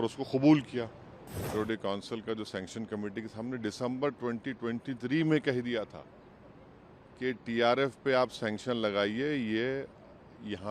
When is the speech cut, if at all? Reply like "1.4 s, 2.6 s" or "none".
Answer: 1.4 s

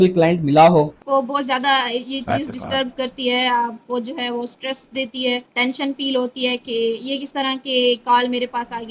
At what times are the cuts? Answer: 1.0 s, 5.5 s

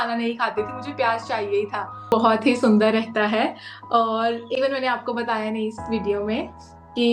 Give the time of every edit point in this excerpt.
2.1 s

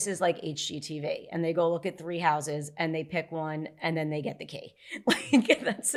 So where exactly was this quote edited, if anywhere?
none

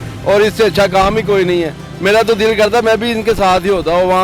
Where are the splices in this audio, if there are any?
none

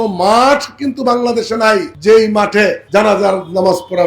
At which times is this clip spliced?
1.9 s, 2.8 s

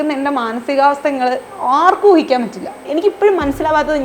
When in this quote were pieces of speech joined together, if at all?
2.9 s

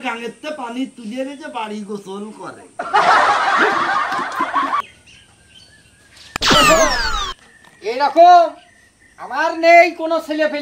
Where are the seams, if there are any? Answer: 4.8 s

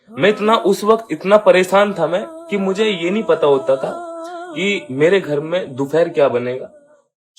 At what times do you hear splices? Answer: none

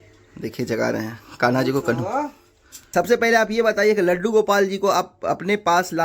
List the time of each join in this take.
2.8 s

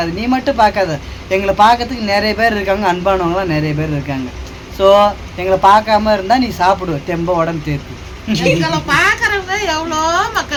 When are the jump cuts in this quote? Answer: none

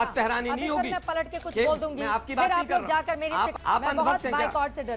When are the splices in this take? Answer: 3.5 s

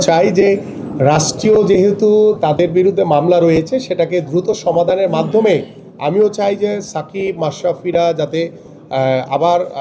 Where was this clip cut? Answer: none

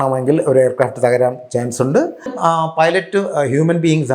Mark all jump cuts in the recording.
2.3 s

